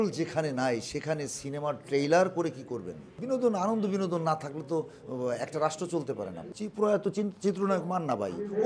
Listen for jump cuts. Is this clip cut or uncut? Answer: cut